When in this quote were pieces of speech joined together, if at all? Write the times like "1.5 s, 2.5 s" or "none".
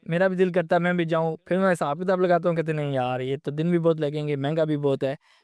none